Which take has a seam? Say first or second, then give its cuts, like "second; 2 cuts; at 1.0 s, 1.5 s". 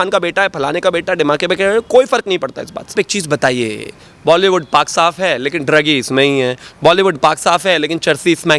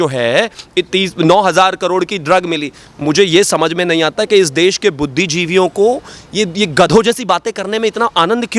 first; 1 cut; at 2.9 s